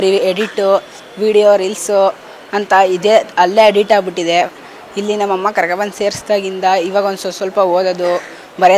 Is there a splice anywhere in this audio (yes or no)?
no